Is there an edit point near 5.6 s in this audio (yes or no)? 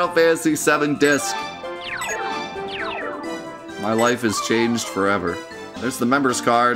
yes